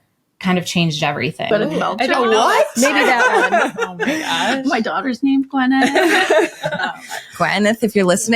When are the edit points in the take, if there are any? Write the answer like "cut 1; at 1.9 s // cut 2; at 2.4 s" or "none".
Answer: cut 1; at 1.5 s